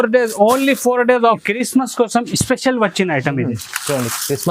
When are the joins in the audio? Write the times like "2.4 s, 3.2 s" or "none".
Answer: 1.4 s